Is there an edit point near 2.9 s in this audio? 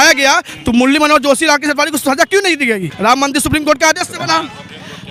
yes; 1 cut; at 2.9 s

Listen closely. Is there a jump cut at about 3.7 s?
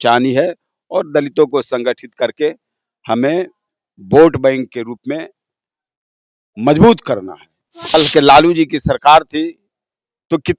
no; 1 cut; at 7.9 s

